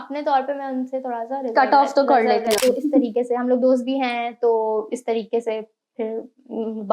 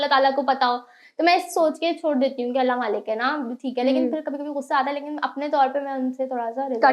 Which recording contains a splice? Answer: first; 1 cut; at 2.6 s

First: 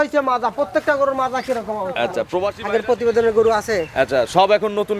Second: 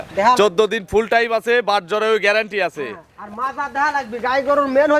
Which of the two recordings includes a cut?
first; 1 cut; at 2.6 s

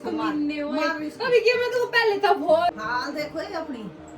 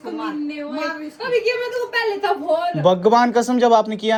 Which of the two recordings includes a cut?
first; 1 cut; at 2.7 s

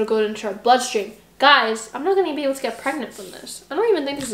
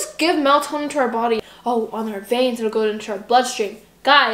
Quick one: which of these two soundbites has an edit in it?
second; 1 cut; at 1.5 s

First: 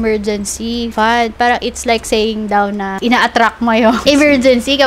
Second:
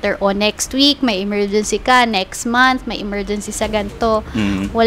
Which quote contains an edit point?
first; 3 cuts; at 0.9 s, 2.9 s, 4.0 s

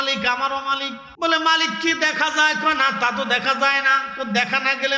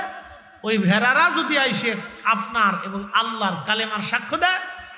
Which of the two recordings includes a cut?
first; 1 cut; at 1.0 s

